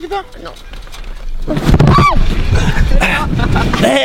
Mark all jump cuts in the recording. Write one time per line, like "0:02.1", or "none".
0:02.9